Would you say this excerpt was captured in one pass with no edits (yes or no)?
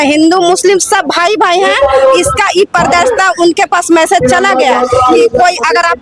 yes